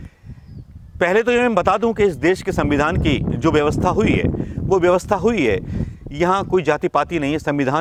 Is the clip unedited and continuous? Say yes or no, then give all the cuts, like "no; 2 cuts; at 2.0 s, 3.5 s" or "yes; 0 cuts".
yes; 0 cuts